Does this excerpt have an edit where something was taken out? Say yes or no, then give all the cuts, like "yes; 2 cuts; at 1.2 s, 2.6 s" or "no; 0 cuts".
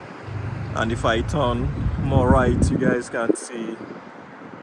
no; 0 cuts